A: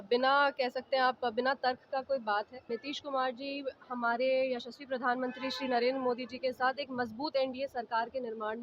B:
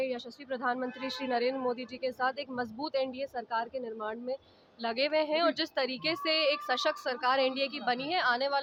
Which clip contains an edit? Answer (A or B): A